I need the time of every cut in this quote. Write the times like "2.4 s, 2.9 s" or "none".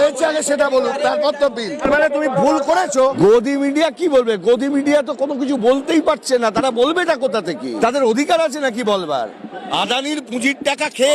1.9 s, 3.0 s, 7.7 s, 9.7 s